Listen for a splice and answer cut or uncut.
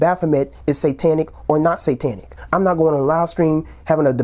cut